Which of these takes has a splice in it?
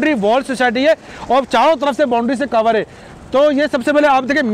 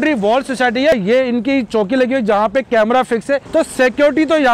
second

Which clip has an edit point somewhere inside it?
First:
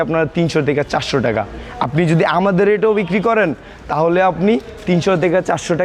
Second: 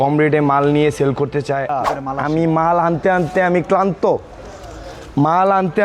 second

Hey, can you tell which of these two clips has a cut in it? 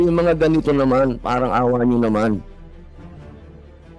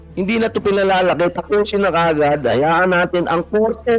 first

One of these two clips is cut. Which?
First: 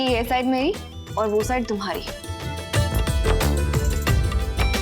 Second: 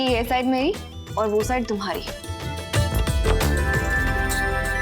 second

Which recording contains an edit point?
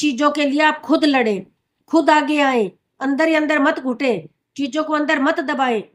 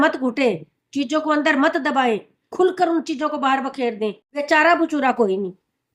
second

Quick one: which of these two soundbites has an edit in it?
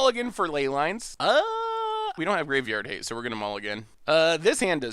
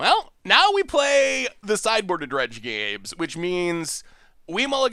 first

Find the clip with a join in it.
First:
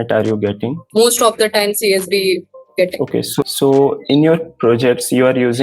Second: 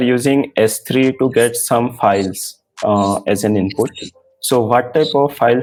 first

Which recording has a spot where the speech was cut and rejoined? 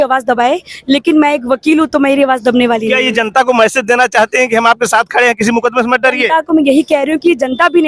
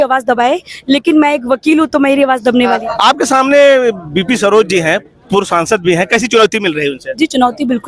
second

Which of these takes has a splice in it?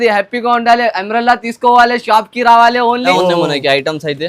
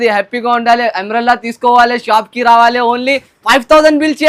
first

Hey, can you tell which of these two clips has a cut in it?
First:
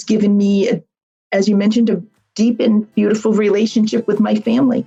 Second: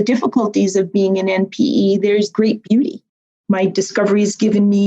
second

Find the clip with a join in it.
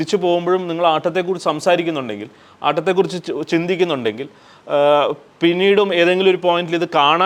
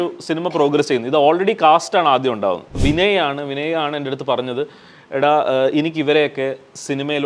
second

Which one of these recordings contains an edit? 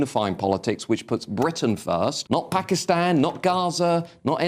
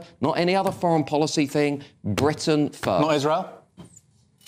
first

